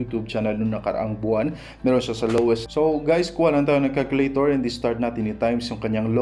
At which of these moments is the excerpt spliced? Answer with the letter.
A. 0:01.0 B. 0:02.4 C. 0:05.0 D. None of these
B